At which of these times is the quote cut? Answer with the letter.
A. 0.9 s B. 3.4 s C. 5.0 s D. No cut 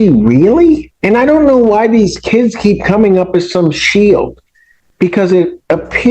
A